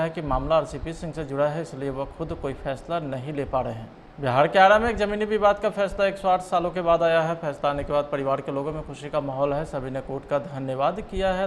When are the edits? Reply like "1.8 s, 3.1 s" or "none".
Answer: 4.2 s